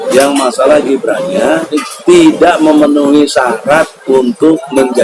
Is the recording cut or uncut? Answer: uncut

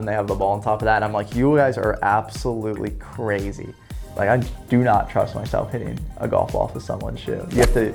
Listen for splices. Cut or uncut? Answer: uncut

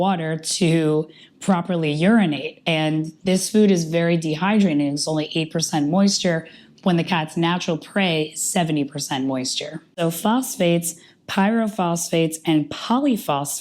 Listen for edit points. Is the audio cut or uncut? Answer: cut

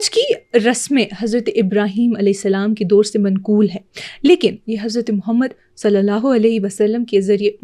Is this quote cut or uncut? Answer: uncut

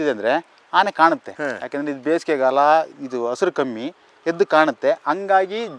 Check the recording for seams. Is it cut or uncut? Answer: cut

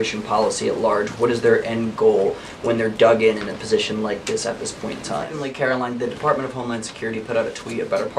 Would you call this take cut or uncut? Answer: cut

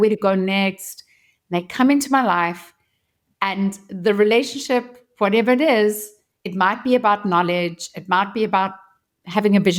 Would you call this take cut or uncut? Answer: uncut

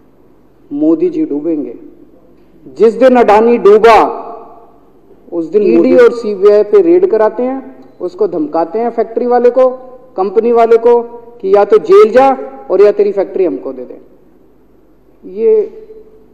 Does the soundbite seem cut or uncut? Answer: cut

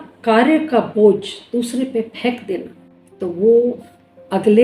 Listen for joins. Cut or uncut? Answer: cut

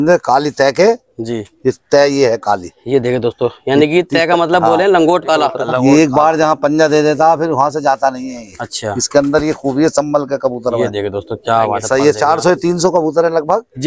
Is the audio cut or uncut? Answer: cut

